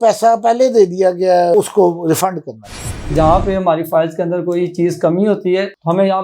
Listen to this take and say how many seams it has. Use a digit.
2